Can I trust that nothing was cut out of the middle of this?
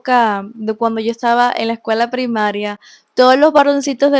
yes; 0 cuts

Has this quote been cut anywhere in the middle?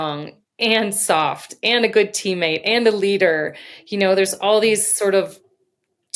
no; 0 cuts

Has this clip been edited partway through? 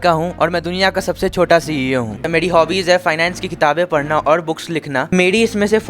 yes; 2 cuts; at 2.3 s, 5.1 s

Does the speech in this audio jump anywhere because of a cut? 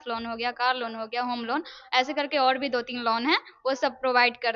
no; 0 cuts

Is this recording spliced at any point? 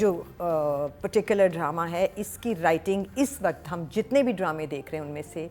no; 0 cuts

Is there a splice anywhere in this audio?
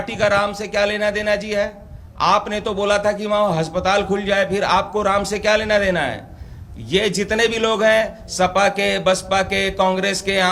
no; 0 cuts

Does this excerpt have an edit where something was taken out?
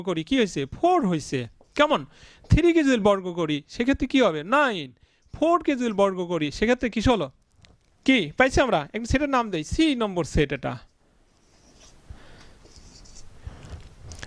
no; 0 cuts

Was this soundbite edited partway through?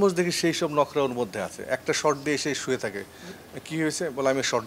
no; 0 cuts

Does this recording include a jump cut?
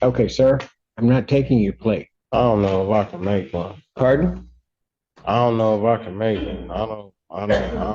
yes; 1 cut; at 2.1 s

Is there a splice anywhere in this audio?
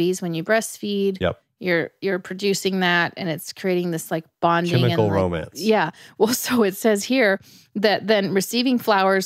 no; 0 cuts

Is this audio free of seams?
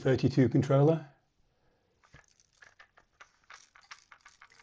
yes; 0 cuts

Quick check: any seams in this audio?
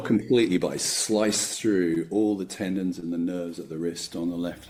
no; 0 cuts

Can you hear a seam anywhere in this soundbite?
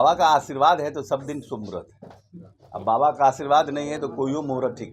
yes; 1 cut; at 4.0 s

